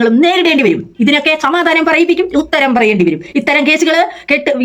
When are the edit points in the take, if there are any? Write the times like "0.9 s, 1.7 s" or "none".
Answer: none